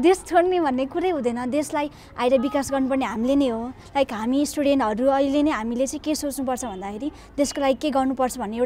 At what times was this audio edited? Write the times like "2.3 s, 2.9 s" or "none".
none